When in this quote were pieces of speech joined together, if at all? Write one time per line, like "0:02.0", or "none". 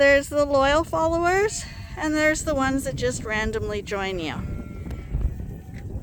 none